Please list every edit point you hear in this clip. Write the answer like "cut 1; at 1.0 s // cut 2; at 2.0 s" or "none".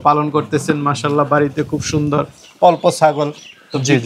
none

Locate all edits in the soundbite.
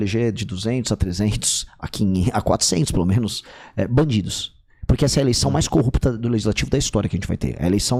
none

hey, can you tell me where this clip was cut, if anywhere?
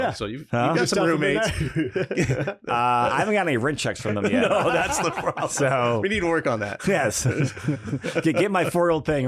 none

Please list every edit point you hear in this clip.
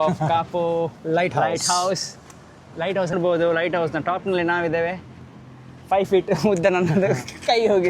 cut 1; at 3.1 s

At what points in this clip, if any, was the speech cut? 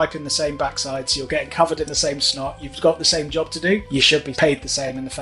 cut 1; at 4.3 s

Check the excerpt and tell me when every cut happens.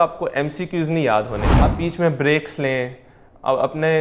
cut 1; at 1.7 s

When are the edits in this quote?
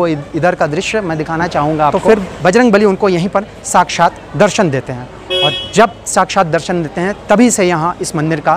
cut 1; at 2.0 s // cut 2; at 5.1 s

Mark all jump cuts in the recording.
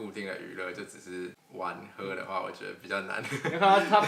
cut 1; at 1.4 s

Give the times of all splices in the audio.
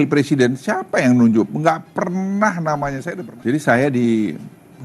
cut 1; at 3.0 s

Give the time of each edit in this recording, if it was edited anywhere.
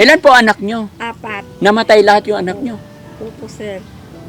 none

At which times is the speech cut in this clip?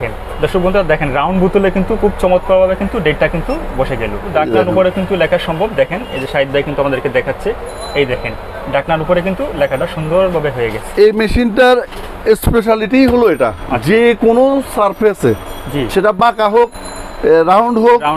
cut 1; at 4.3 s

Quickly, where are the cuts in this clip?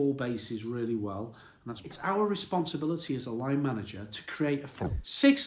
cut 1; at 1.8 s // cut 2; at 4.7 s

